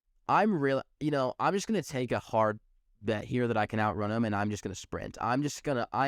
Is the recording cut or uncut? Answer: uncut